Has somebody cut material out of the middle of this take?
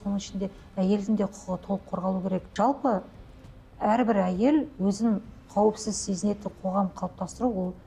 yes; 1 cut; at 2.5 s

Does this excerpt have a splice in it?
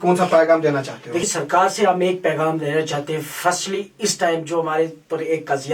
yes; 1 cut; at 1.3 s

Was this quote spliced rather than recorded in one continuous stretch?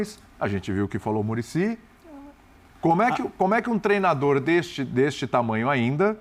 no; 0 cuts

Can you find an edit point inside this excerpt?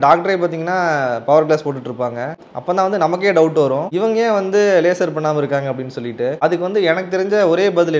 no; 0 cuts

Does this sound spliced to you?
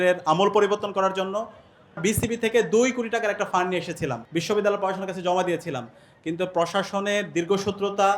yes; 2 cuts; at 2.0 s, 4.2 s

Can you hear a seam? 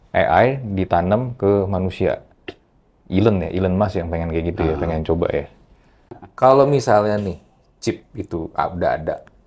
yes; 1 cut; at 6.3 s

